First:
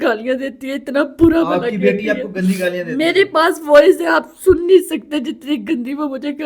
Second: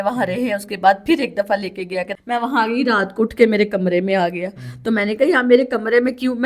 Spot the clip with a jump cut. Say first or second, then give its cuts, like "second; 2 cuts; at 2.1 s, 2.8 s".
second; 1 cut; at 2.1 s